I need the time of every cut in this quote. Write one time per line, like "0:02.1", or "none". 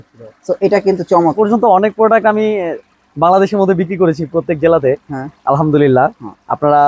0:01.3

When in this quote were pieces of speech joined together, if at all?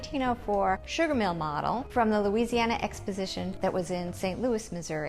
0:00.9
0:01.8
0:03.5

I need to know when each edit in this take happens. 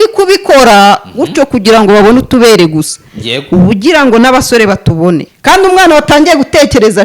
0:05.3

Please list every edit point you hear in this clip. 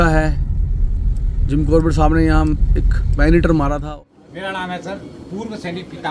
0:03.8

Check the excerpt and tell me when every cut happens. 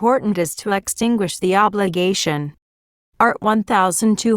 0:01.7
0:03.2

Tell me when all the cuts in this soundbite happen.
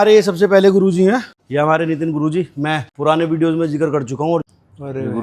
0:01.4
0:02.9
0:04.5

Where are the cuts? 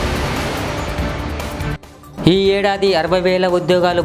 0:01.9

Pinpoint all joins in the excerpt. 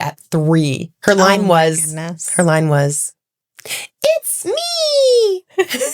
none

